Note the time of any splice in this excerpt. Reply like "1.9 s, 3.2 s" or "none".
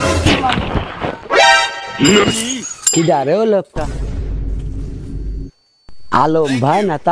none

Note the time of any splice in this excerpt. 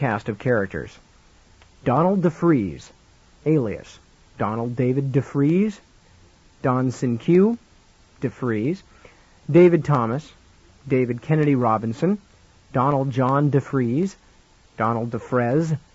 5.9 s

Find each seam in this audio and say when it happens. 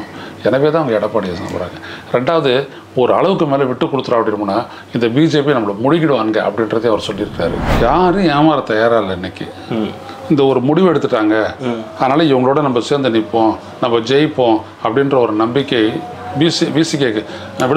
7.6 s

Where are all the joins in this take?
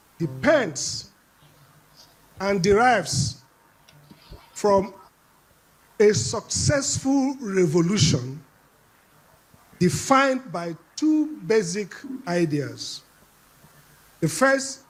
none

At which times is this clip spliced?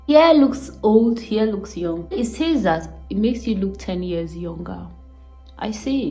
2.1 s

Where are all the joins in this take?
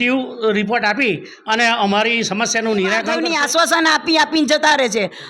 3.1 s

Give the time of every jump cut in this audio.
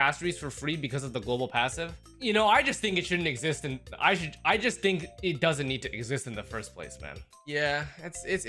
none

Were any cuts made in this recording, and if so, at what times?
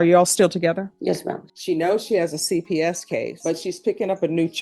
1.1 s

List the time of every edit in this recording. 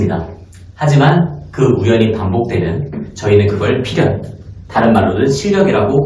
none

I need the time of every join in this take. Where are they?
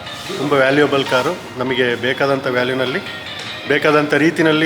none

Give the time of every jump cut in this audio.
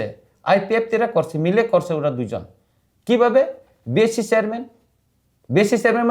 none

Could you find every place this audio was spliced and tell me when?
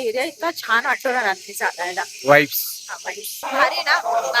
3.5 s

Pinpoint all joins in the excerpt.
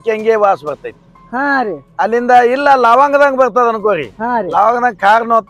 none

